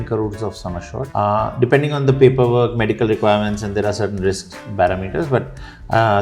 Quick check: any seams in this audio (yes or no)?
yes